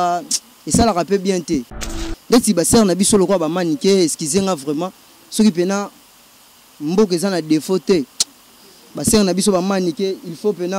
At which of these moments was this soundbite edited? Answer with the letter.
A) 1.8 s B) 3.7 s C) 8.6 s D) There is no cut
A